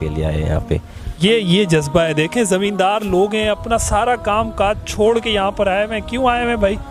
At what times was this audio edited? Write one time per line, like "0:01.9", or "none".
0:01.0